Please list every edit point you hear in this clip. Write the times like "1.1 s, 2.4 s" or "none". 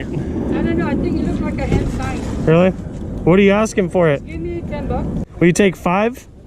5.2 s